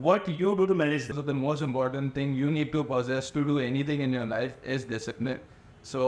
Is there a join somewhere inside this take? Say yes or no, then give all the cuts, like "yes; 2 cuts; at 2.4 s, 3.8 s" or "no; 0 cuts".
yes; 1 cut; at 1.2 s